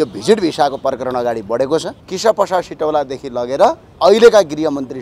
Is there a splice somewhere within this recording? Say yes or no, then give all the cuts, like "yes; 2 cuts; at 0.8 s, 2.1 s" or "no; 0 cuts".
yes; 2 cuts; at 2.0 s, 3.9 s